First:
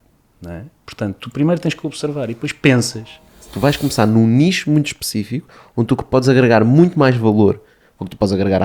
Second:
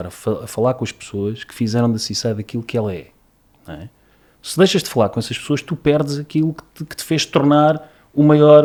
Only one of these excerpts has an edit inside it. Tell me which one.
first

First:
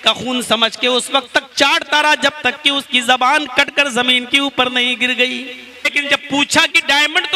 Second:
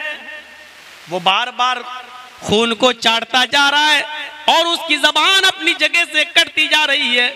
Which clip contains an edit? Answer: first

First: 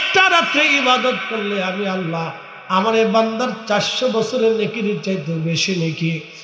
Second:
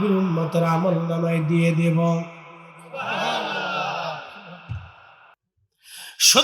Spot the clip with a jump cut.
second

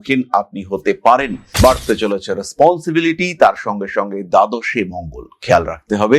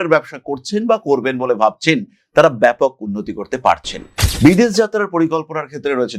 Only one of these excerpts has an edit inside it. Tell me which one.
first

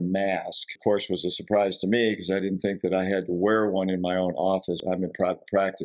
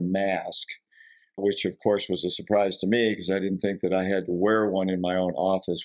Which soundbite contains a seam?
first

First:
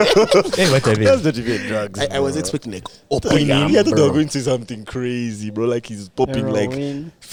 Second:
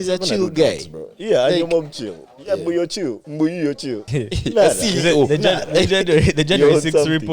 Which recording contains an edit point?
second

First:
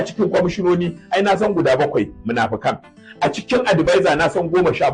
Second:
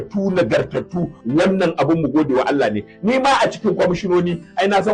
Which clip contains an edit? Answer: second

